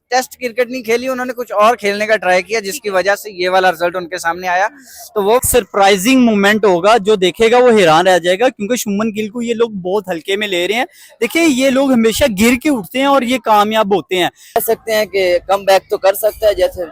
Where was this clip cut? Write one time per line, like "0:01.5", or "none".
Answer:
0:05.4
0:14.6